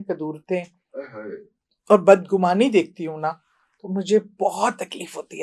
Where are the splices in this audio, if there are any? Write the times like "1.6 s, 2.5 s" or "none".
none